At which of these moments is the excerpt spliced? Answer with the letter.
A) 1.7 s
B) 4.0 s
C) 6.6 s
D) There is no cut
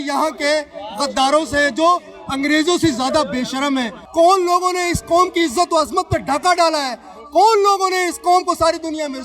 B